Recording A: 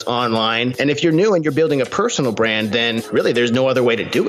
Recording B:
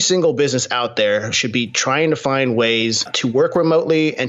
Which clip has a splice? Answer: A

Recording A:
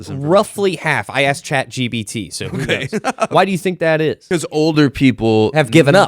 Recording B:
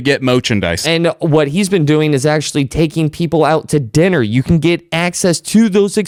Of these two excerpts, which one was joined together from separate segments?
A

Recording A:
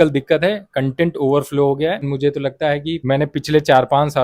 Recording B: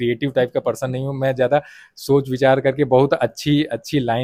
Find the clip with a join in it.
A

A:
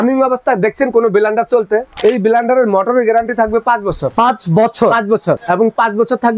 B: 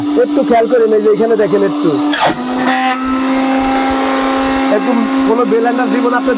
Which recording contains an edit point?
A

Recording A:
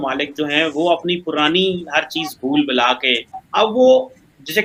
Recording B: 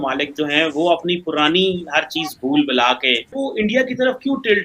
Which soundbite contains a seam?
B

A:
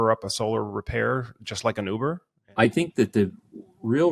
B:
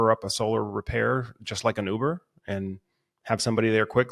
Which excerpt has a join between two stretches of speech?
A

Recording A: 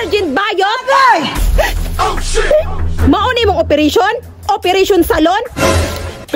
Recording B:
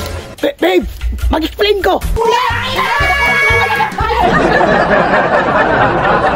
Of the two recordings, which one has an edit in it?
B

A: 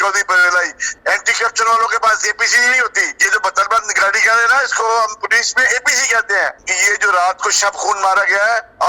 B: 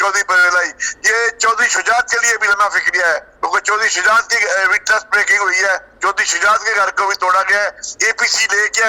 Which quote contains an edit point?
A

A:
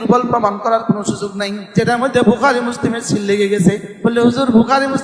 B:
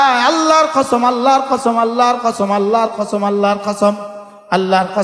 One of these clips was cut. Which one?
A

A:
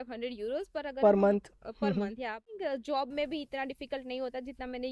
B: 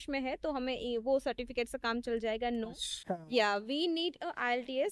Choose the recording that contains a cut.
A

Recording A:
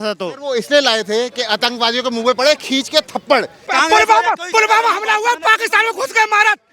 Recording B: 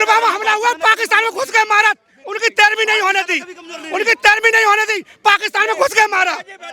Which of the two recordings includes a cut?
A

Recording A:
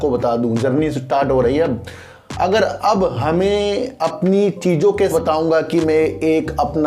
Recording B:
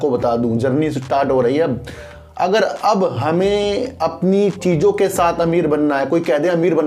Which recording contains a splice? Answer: A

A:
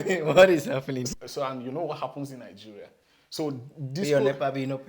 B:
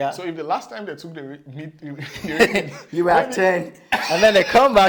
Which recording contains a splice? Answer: A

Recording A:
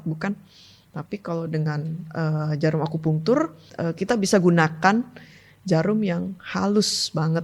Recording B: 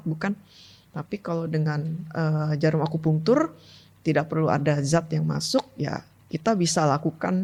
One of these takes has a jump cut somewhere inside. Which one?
A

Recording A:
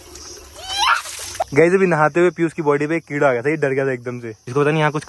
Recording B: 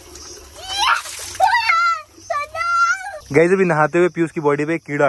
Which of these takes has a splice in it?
A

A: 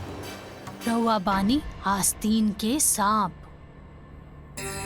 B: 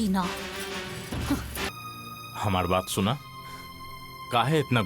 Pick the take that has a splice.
B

